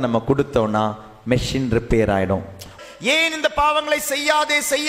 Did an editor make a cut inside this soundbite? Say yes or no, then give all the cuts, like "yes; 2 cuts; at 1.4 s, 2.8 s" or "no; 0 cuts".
yes; 1 cut; at 2.8 s